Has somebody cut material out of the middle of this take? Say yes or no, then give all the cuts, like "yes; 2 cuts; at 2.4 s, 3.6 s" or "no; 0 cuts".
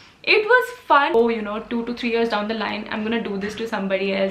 yes; 1 cut; at 1.1 s